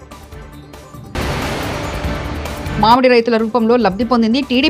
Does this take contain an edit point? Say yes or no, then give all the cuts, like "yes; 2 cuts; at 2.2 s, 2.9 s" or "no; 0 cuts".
yes; 2 cuts; at 0.9 s, 2.7 s